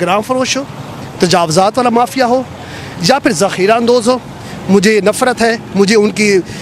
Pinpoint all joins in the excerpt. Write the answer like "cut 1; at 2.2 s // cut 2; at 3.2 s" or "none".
none